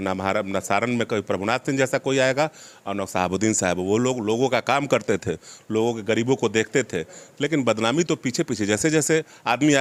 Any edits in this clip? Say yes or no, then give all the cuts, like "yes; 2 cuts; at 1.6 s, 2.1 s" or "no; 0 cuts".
no; 0 cuts